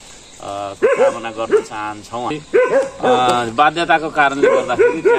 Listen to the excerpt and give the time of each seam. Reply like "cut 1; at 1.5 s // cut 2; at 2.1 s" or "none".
cut 1; at 2.4 s